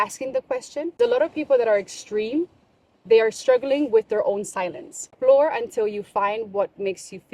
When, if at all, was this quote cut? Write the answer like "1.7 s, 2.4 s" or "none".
1.0 s, 5.0 s